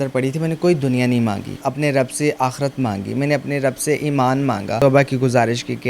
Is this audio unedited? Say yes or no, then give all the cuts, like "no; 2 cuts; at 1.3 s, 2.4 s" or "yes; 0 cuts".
no; 2 cuts; at 1.6 s, 4.7 s